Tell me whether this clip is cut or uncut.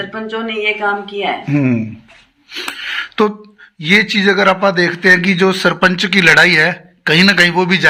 uncut